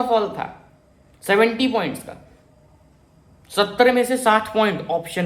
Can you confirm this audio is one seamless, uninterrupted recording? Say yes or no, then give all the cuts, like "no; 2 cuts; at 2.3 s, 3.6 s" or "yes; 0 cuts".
yes; 0 cuts